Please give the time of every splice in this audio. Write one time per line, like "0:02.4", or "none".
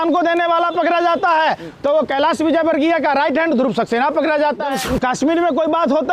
0:04.7